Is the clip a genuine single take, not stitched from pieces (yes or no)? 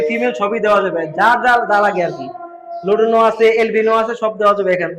yes